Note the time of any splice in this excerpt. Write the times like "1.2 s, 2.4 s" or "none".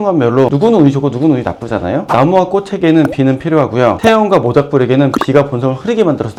none